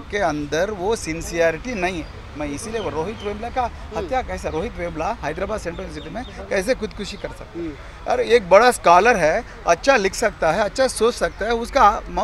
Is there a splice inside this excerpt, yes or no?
no